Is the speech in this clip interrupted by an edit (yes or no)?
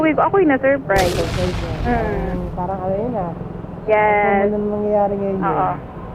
no